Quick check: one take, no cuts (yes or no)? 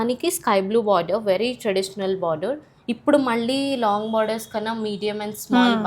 yes